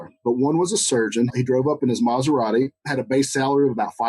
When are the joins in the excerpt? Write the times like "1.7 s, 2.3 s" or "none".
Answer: 1.3 s, 2.8 s